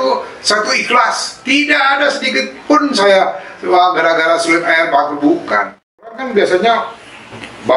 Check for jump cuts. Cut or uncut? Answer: cut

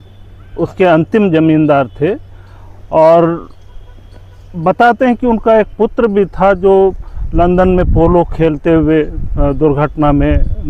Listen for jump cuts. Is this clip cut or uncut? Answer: uncut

